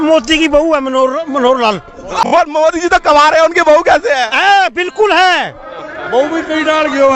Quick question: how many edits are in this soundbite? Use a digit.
1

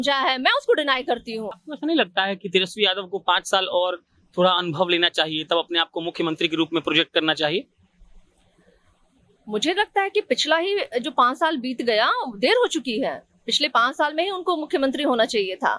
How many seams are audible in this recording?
1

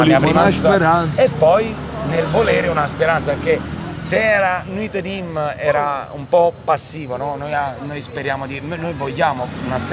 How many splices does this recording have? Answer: 0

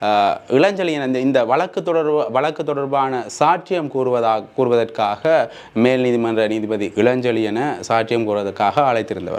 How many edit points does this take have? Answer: 0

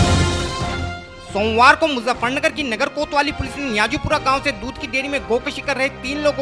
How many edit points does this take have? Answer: 1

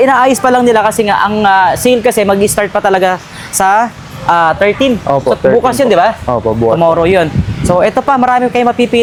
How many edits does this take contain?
0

